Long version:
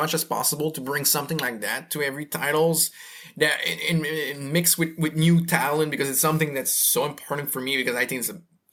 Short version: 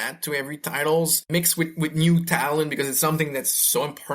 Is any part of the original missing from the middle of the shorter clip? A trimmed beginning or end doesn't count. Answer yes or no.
yes